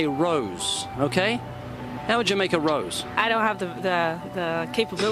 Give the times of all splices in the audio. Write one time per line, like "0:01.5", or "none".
0:01.9